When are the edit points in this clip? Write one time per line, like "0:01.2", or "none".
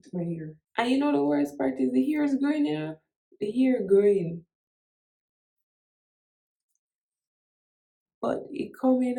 none

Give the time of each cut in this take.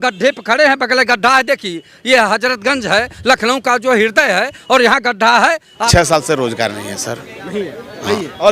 0:05.7

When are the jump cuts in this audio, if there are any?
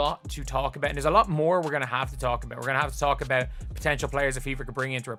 none

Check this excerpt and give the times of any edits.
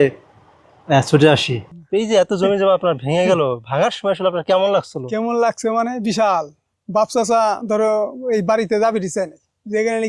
0:01.6

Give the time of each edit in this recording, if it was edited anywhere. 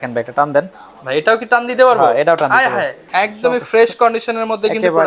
0:03.0

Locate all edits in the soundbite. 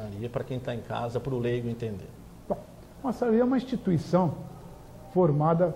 none

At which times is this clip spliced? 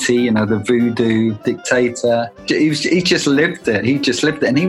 0:01.4
0:02.4

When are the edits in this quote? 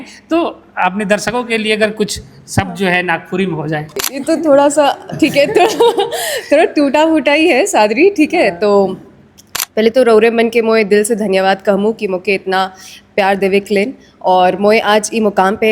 0:04.1

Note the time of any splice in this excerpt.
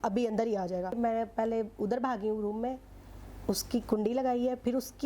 0:00.9

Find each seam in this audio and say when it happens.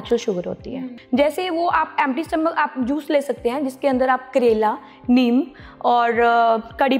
0:00.9

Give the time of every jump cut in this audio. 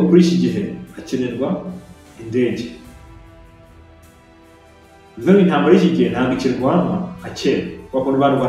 0:03.0
0:05.3

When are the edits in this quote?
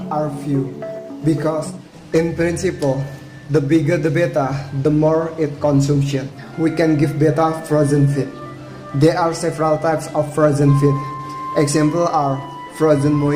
0:01.7
0:06.4

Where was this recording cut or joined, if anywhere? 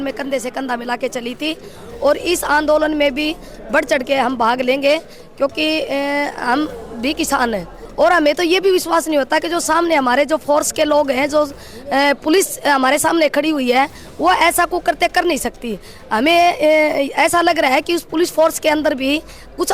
0:07.8

